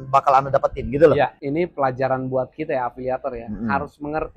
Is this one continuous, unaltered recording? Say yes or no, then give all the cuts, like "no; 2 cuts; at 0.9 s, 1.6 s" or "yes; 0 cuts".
no; 1 cut; at 1.4 s